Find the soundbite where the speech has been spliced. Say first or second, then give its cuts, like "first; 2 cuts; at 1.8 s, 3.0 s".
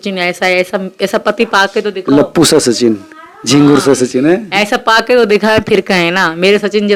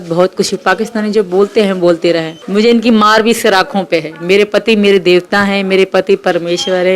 second; 1 cut; at 2.4 s